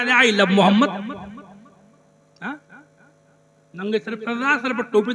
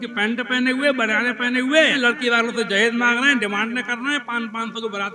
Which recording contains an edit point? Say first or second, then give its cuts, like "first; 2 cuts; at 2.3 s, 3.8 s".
second; 1 cut; at 2.0 s